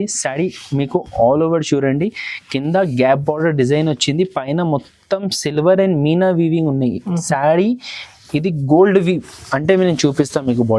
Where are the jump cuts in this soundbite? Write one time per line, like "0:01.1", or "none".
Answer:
none